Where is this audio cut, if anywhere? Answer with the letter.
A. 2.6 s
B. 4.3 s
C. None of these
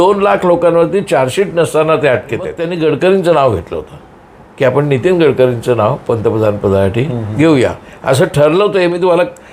A